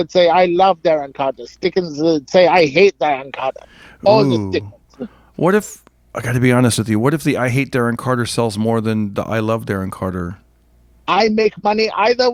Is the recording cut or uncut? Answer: uncut